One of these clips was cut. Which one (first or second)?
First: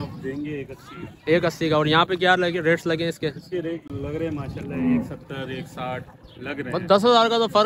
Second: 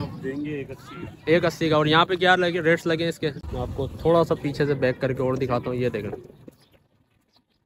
second